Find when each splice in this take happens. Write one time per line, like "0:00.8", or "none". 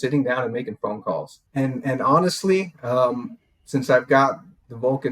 0:01.4